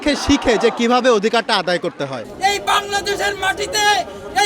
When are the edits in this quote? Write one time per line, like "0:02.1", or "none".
0:02.2